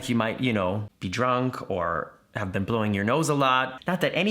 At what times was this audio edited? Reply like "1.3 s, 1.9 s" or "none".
0.9 s